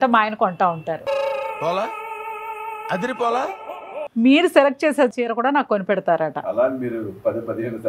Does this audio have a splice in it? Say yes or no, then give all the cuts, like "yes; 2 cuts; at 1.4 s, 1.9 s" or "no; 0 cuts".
yes; 2 cuts; at 4.0 s, 5.1 s